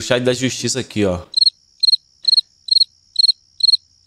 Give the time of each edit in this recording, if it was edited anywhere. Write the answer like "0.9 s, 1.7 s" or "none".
none